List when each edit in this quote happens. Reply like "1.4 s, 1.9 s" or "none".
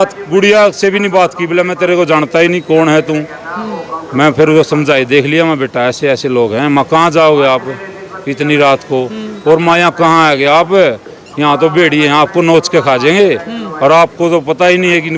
none